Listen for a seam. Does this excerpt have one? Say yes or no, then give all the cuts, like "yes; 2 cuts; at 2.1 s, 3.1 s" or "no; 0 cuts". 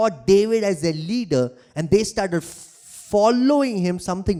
no; 0 cuts